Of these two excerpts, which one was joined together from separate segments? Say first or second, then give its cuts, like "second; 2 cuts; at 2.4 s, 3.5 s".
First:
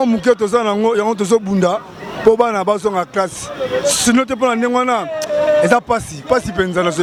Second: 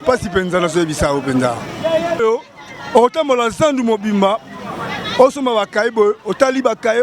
second; 1 cut; at 2.2 s